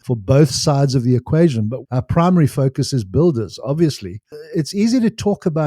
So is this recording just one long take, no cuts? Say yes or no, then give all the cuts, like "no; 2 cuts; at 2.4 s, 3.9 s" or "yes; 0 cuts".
no; 2 cuts; at 1.8 s, 4.2 s